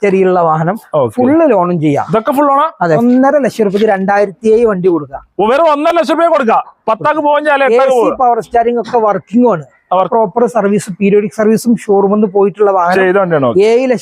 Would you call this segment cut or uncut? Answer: cut